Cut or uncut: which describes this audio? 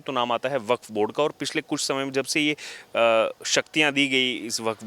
uncut